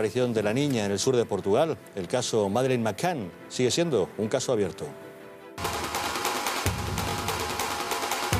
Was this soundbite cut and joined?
no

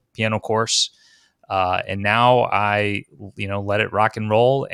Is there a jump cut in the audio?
no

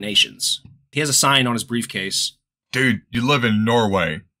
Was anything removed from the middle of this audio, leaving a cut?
yes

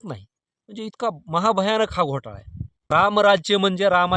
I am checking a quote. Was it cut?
yes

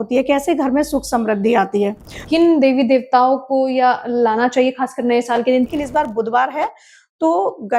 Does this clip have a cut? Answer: yes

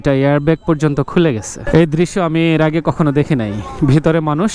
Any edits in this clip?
yes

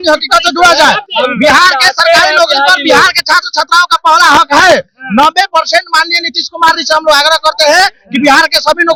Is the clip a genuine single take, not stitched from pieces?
yes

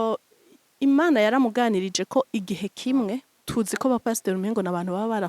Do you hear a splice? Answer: yes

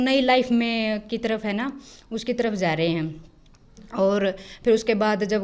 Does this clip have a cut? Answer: no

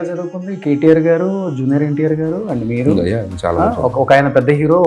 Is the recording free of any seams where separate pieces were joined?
yes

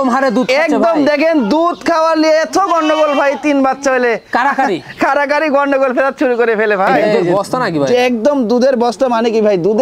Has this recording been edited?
yes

